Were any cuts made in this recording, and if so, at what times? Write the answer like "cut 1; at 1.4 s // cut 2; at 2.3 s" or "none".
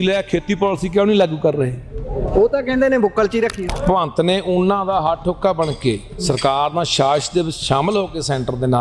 cut 1; at 3.7 s